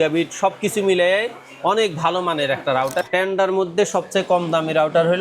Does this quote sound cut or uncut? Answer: cut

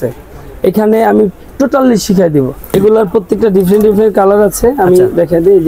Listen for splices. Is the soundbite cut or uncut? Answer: cut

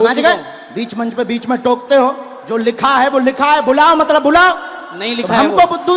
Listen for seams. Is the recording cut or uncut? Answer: uncut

